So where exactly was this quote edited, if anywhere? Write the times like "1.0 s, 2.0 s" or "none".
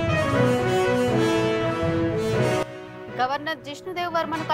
2.8 s